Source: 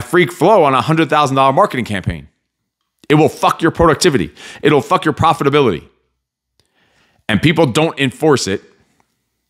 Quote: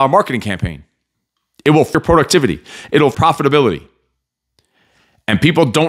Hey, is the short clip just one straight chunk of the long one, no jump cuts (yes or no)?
no